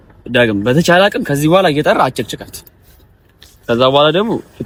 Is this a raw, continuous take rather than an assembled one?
yes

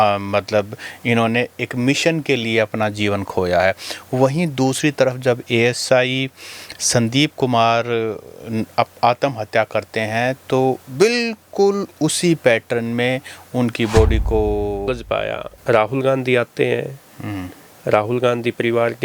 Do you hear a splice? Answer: yes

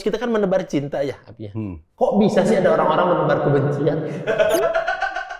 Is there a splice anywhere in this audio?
no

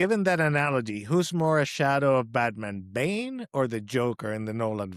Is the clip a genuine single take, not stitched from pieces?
yes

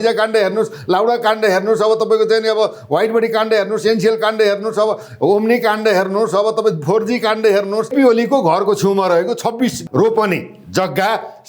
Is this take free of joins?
no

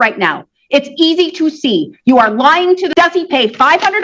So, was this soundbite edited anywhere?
yes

